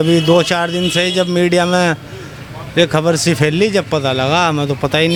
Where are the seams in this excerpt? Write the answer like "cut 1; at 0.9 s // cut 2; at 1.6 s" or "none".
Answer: none